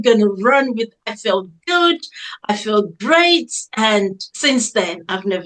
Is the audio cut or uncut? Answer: cut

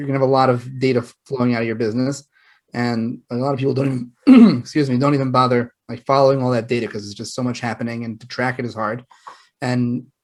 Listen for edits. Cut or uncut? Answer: uncut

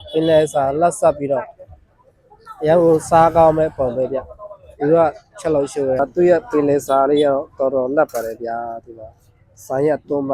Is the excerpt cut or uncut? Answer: cut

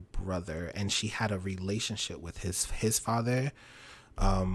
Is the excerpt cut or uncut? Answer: uncut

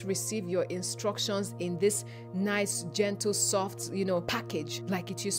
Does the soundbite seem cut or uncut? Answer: cut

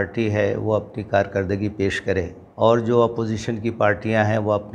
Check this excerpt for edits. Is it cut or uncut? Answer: cut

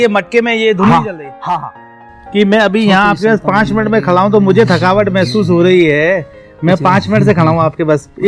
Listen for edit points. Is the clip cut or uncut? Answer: cut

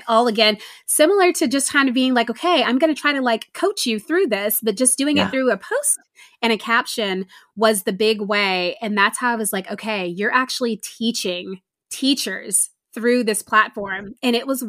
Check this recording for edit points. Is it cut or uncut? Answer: uncut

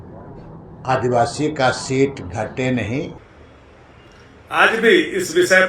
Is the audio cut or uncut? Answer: cut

